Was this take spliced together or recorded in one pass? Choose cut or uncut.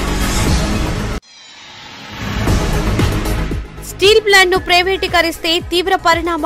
cut